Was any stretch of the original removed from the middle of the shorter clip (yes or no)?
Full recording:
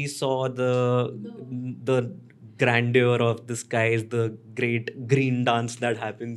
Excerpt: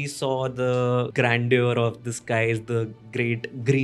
yes